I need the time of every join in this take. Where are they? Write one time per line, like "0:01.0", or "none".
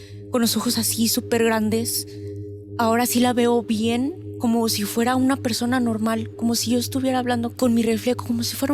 0:07.6